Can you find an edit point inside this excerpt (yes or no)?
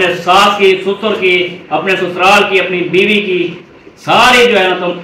no